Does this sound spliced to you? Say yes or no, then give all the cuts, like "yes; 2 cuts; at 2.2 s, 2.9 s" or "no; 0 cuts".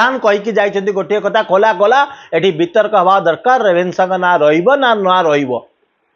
no; 0 cuts